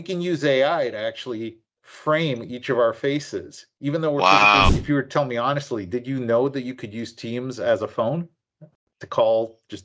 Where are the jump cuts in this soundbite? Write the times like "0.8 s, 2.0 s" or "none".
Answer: 4.8 s